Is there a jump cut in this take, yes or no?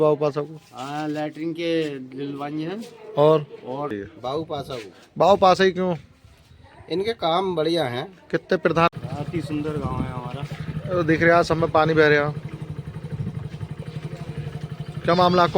yes